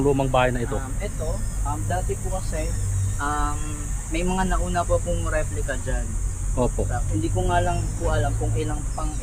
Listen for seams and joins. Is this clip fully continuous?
yes; 0 cuts

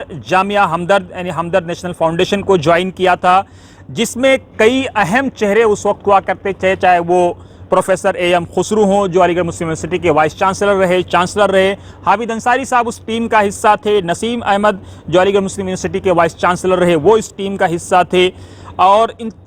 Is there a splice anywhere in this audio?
no; 0 cuts

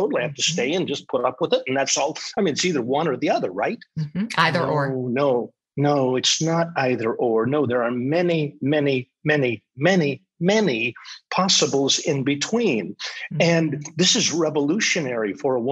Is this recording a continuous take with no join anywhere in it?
yes; 0 cuts

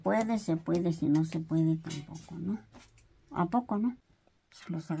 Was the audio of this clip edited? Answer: yes; 1 cut; at 4.1 s

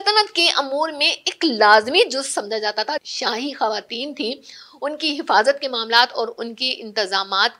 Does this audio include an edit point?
yes; 1 cut; at 3.1 s

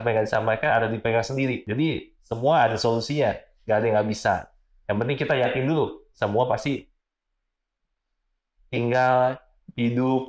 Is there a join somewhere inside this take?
yes; 1 cut; at 1.6 s

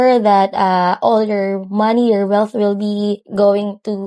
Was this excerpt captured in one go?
yes; 0 cuts

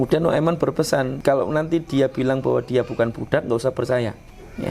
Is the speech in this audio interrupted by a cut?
yes; 1 cut; at 1.1 s

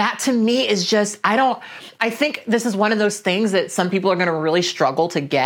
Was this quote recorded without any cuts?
yes; 0 cuts

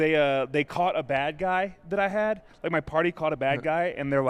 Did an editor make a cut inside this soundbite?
no; 0 cuts

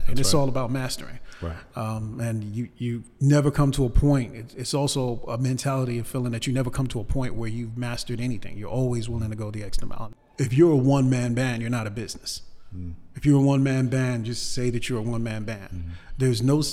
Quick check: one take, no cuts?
no; 1 cut; at 10.1 s

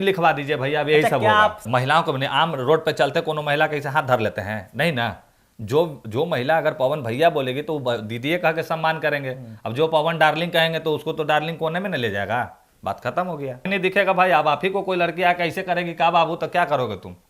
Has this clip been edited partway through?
yes; 2 cuts; at 1.6 s, 13.7 s

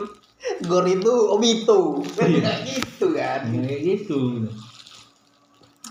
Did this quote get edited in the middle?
no; 0 cuts

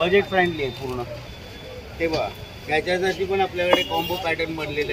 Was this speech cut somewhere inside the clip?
yes; 1 cut; at 1.4 s

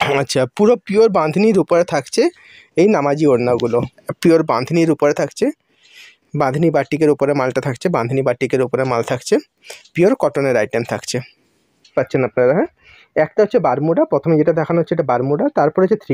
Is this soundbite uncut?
no; 2 cuts; at 4.0 s, 11.9 s

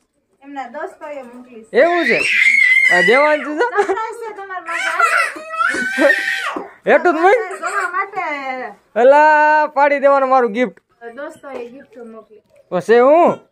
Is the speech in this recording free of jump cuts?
no; 1 cut; at 11.1 s

